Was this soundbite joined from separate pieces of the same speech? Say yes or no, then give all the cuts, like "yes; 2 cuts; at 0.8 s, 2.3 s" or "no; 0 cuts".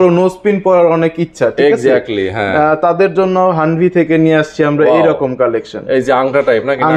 no; 0 cuts